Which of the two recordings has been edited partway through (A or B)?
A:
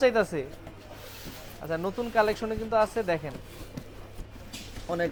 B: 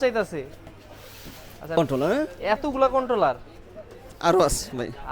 B